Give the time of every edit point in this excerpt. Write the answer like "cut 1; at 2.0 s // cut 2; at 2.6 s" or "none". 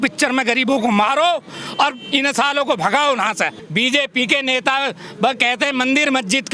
cut 1; at 3.6 s